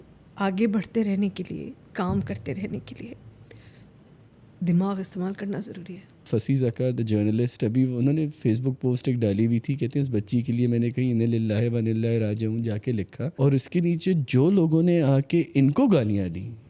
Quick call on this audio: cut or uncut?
cut